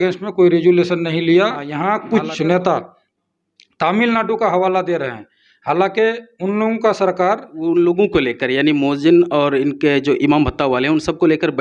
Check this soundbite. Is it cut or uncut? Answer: cut